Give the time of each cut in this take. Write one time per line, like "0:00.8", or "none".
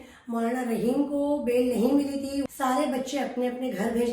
0:02.5